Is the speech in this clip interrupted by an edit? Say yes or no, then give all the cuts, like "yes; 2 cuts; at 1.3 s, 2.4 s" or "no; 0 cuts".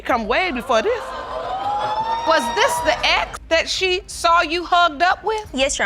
yes; 1 cut; at 2.3 s